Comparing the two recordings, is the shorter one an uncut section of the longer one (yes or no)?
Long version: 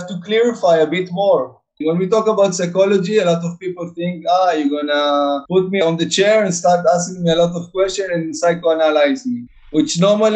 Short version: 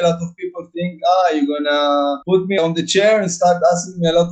yes